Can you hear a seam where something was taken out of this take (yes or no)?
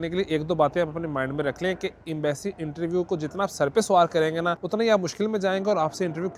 no